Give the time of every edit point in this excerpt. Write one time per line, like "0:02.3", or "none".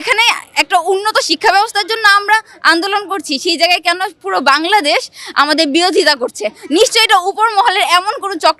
none